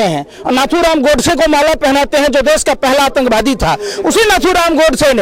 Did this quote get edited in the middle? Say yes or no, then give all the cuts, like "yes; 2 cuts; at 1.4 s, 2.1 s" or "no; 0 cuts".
no; 0 cuts